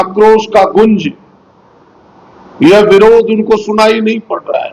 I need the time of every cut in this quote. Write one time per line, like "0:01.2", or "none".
none